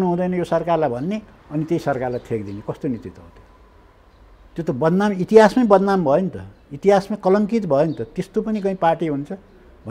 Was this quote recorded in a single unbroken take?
yes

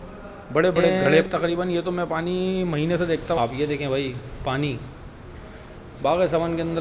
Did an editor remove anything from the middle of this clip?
yes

